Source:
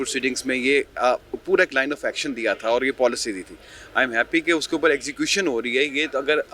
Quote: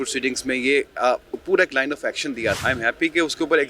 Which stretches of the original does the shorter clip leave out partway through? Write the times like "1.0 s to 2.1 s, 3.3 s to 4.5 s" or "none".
2.6 s to 3.9 s